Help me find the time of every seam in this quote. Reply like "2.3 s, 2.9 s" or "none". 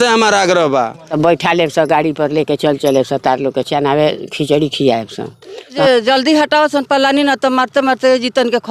1.1 s, 5.6 s